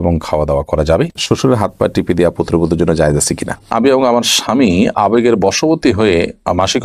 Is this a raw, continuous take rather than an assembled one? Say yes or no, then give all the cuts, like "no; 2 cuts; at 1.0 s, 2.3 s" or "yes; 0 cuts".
no; 2 cuts; at 1.2 s, 3.7 s